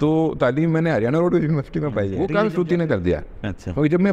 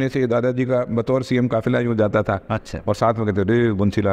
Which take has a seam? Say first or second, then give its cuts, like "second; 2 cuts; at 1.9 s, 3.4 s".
first; 1 cut; at 2.1 s